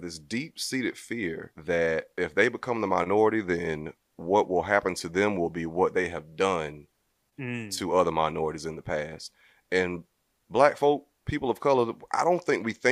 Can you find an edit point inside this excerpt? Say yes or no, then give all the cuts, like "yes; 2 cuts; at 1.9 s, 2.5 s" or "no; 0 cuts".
yes; 2 cuts; at 1.5 s, 2.1 s